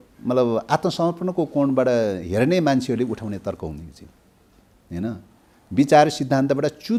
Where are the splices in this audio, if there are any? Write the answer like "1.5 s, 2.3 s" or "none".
none